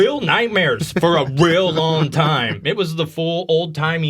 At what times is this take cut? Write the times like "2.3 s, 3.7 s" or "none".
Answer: 2.6 s